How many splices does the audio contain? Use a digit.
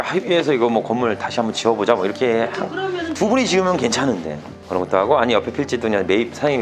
0